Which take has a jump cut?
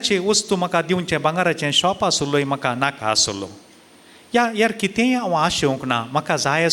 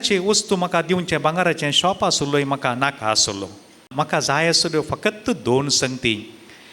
second; 1 cut; at 3.9 s

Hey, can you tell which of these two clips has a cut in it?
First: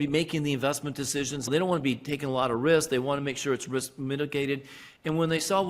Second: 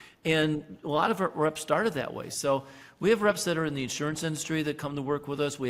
first; 1 cut; at 1.5 s

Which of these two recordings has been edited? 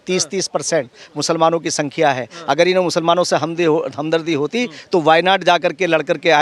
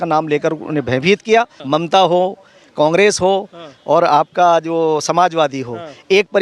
second; 1 cut; at 1.6 s

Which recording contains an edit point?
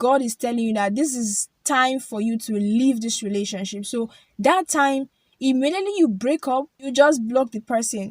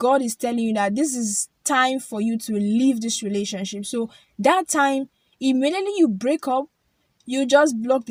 first; 1 cut; at 6.8 s

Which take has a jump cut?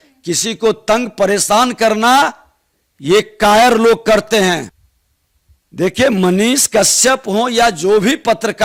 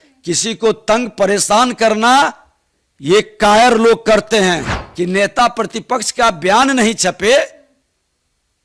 second; 1 cut; at 4.8 s

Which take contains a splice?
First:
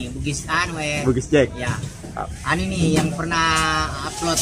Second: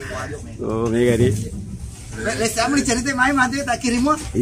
second; 1 cut; at 2.2 s

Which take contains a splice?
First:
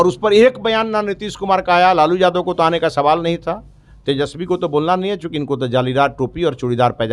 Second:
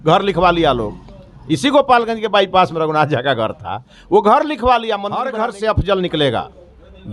second; 1 cut; at 5.2 s

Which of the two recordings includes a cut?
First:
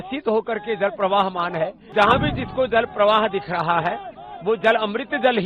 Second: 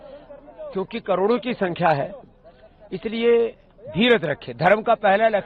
first; 1 cut; at 1.8 s

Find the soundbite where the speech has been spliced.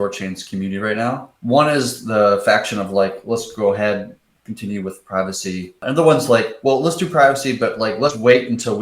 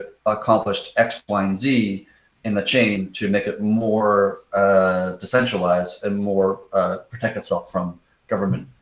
first; 2 cuts; at 1.3 s, 5.8 s

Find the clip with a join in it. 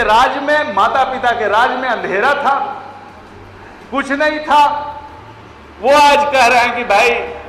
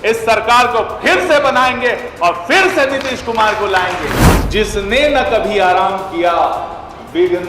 second; 1 cut; at 4.3 s

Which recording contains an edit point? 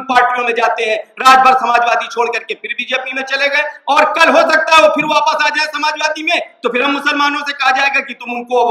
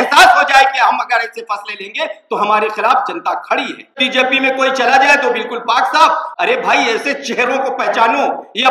second; 2 cuts; at 4.0 s, 6.3 s

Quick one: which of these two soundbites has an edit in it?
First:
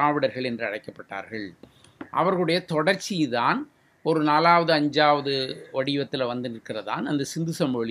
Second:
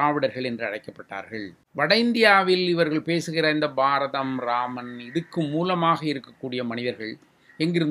second; 1 cut; at 1.6 s

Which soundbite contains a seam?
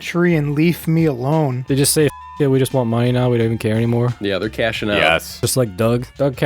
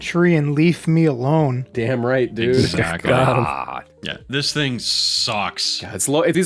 first; 2 cuts; at 1.6 s, 5.4 s

